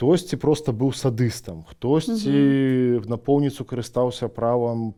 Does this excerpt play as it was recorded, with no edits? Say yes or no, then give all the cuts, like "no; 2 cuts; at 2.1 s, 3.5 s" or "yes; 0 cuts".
yes; 0 cuts